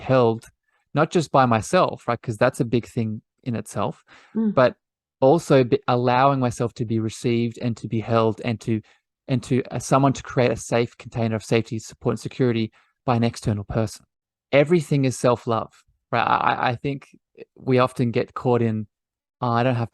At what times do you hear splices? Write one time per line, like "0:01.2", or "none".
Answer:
0:14.0

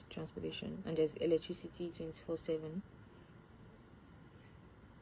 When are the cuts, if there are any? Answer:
none

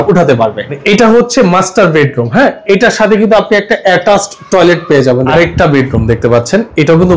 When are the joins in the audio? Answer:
0:00.8
0:05.2

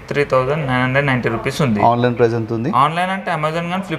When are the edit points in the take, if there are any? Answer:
none

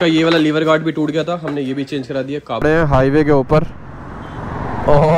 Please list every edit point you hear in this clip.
0:02.6

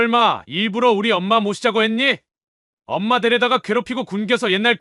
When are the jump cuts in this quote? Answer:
none

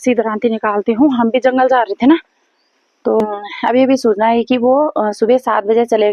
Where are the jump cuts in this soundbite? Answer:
0:03.2

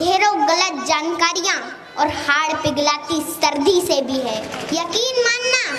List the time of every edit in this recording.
0:04.5

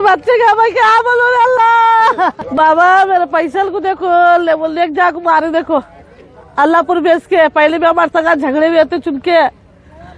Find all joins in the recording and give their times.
0:02.5

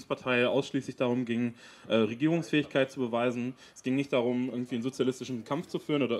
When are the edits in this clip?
none

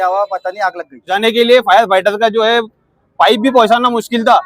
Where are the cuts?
0:01.1

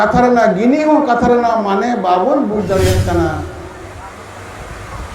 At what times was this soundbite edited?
0:03.9

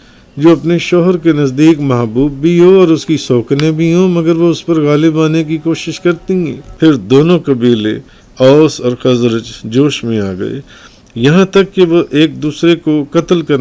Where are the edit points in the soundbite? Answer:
0:06.6

